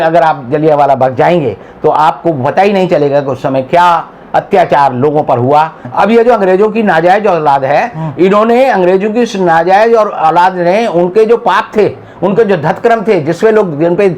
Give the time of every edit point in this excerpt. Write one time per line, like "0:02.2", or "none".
0:05.8